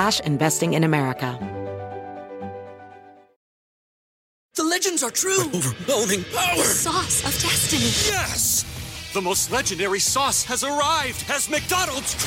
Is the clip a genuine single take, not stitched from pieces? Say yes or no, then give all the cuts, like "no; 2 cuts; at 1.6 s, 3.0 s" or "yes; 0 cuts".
no; 1 cut; at 1.3 s